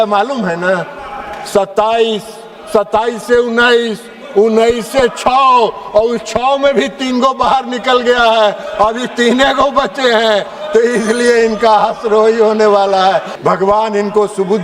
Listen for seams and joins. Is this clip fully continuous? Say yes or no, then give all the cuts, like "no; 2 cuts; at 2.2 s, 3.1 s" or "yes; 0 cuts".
no; 1 cut; at 13.3 s